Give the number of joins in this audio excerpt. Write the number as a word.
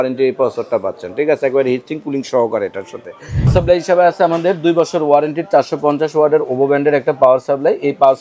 one